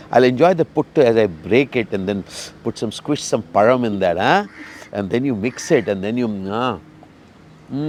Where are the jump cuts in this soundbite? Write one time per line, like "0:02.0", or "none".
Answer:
none